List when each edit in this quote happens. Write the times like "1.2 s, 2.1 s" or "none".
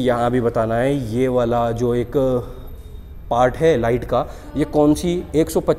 none